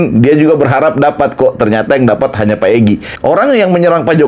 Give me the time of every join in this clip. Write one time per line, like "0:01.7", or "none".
0:03.1